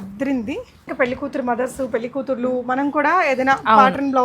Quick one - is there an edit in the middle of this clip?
yes; 1 cut; at 0.9 s

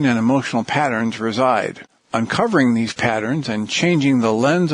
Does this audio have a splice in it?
no; 0 cuts

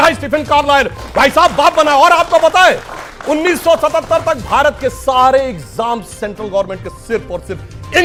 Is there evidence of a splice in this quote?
no; 0 cuts

